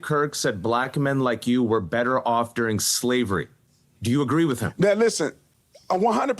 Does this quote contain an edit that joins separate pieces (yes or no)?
yes